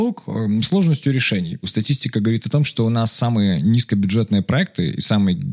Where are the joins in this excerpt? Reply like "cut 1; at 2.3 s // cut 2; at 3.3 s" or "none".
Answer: cut 1; at 1.6 s